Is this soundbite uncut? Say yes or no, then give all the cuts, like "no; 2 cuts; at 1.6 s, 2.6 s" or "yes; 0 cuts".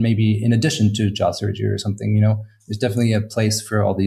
yes; 0 cuts